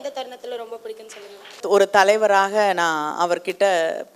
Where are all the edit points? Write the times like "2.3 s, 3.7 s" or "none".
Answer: 1.6 s